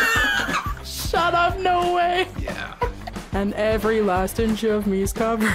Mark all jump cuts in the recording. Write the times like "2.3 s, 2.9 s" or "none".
3.0 s